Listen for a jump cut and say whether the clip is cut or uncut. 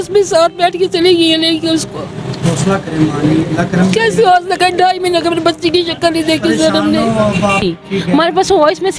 cut